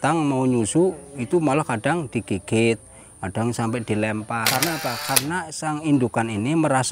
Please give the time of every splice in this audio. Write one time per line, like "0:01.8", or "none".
0:04.5